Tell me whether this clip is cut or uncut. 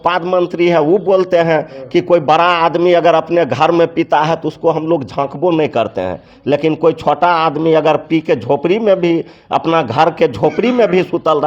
uncut